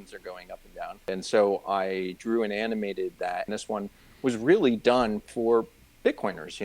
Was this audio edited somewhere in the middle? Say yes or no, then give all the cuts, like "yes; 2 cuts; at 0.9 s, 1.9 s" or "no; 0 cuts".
yes; 2 cuts; at 1.1 s, 3.5 s